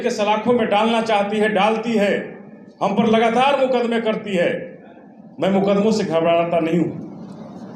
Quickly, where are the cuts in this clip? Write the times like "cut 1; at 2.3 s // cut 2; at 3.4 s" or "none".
none